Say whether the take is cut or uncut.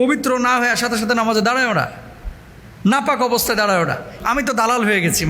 cut